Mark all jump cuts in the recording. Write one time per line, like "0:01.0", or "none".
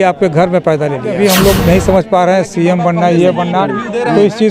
0:01.2

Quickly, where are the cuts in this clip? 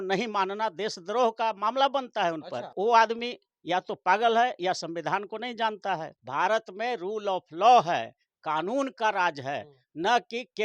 0:02.7
0:06.2

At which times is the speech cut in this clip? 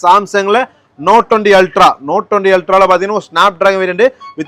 none

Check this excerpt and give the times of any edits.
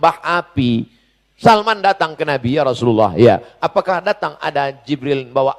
none

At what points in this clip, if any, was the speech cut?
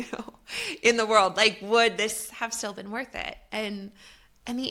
none

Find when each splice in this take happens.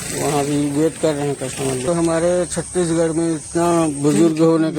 0:01.8

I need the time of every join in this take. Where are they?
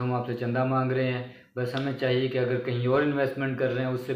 none

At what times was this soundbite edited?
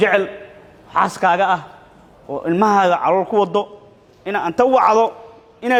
none

